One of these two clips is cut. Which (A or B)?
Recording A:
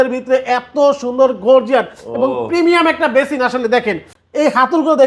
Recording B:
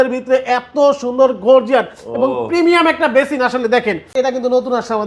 B